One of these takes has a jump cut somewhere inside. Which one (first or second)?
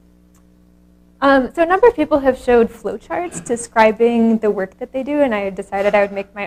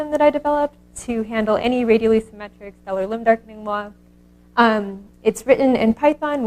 second